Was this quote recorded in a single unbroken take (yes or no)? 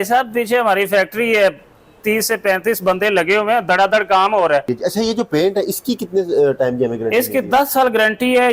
no